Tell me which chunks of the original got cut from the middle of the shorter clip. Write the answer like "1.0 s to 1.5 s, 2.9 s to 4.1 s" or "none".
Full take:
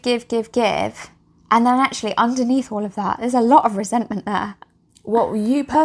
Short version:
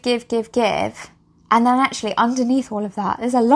none